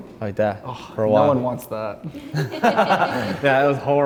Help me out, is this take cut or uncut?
uncut